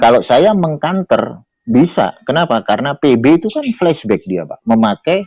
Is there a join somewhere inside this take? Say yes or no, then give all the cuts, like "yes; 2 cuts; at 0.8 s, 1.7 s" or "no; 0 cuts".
no; 0 cuts